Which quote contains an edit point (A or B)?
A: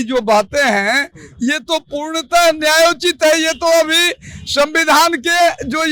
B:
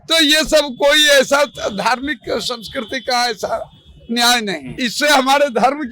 B